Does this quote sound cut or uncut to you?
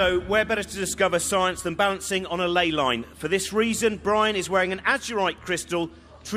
cut